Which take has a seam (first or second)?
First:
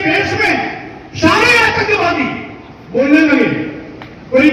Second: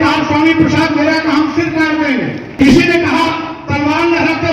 second